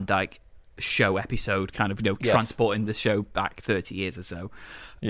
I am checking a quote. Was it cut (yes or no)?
no